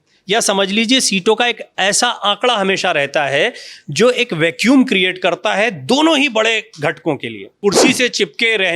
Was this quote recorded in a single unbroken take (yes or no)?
no